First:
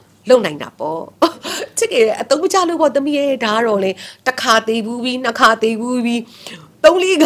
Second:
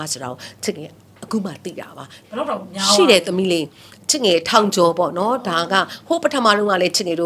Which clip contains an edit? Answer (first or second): second